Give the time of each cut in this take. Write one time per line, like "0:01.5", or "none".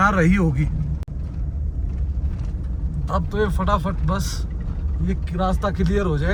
none